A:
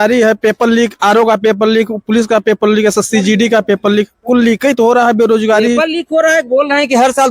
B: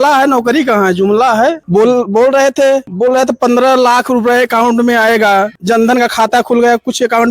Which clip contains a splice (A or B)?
B